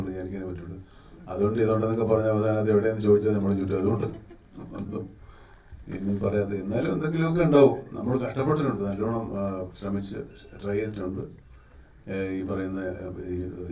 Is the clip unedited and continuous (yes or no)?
yes